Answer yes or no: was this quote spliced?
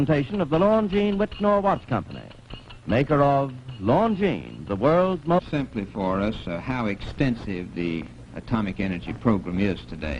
no